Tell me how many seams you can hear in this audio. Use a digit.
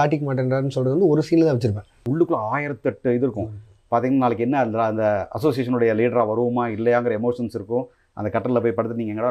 1